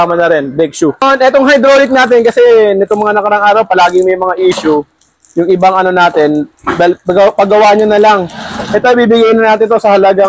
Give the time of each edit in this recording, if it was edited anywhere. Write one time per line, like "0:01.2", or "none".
0:01.0